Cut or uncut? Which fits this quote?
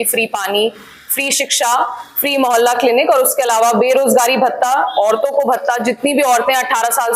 uncut